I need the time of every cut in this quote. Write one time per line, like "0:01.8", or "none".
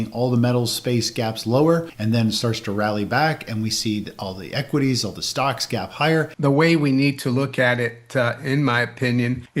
0:01.9
0:06.3